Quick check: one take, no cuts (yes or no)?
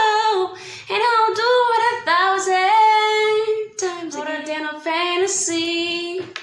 no